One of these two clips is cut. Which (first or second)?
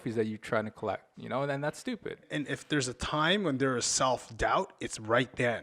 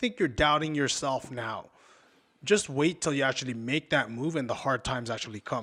first